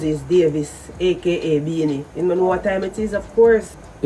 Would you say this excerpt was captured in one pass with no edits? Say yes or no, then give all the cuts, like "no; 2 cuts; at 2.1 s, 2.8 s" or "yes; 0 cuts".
yes; 0 cuts